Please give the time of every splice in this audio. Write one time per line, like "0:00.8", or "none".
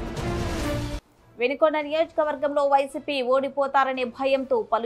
0:00.9